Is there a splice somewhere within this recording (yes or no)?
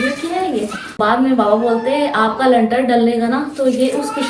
yes